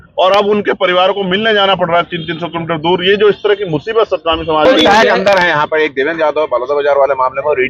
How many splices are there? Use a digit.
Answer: 1